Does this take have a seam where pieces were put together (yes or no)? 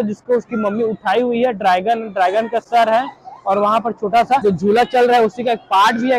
no